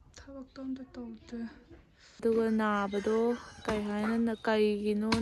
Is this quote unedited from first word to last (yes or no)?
no